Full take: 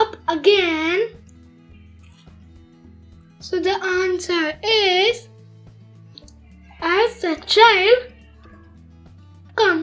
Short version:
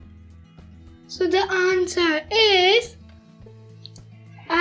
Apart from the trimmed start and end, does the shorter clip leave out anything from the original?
yes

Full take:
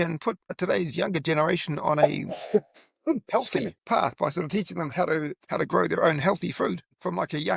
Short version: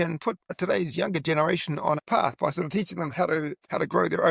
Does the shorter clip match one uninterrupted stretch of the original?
no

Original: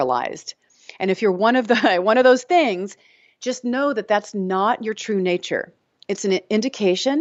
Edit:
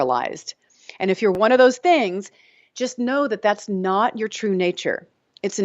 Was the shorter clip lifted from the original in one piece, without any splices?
no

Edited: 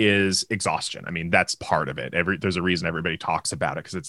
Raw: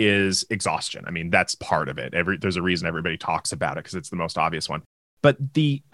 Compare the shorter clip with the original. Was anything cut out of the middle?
no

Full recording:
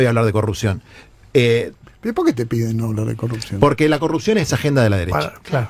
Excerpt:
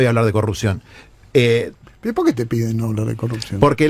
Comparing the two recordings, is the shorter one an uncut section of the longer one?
yes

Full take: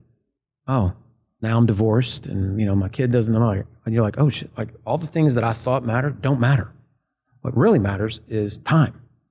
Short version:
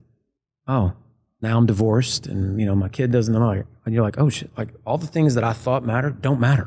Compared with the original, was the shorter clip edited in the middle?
no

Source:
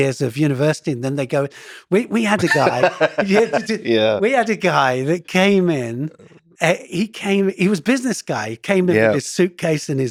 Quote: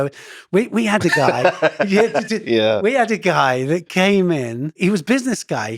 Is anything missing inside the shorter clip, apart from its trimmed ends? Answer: yes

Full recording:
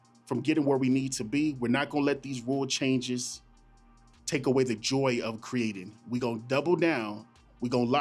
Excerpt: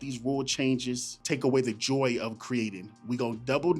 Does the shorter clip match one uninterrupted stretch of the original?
no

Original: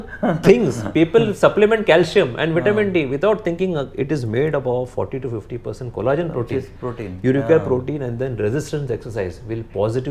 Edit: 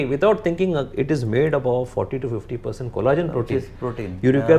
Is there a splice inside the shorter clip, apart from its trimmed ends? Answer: no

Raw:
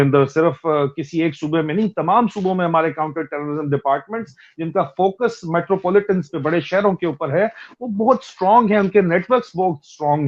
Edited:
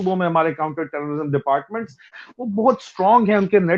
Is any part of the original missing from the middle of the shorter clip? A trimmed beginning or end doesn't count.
yes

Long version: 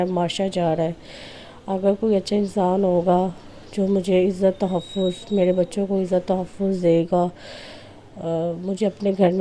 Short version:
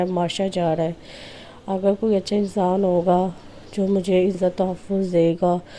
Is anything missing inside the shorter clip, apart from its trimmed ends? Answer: yes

